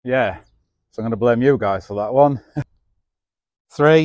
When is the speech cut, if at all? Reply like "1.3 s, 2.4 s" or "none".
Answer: 2.5 s